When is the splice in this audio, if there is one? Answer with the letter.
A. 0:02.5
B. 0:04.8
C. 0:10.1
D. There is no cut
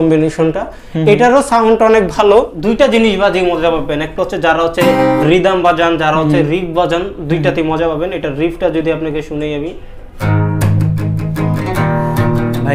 A